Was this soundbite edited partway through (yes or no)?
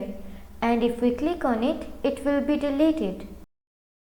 no